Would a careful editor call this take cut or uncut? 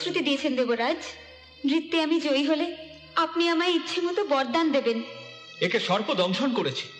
uncut